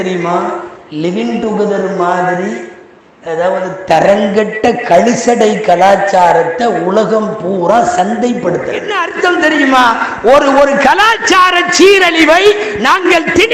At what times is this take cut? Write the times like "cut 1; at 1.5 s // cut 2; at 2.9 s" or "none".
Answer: cut 1; at 9.0 s